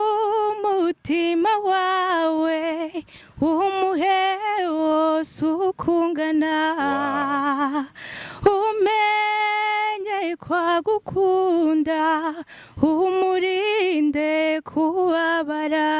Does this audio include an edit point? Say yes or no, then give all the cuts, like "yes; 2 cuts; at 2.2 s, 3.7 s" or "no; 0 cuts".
no; 0 cuts